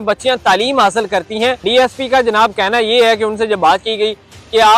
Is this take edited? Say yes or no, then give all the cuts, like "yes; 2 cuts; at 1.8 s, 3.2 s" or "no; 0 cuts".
yes; 1 cut; at 1.6 s